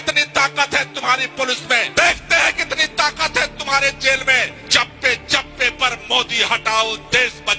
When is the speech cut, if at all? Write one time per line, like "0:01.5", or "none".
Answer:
0:01.9
0:04.6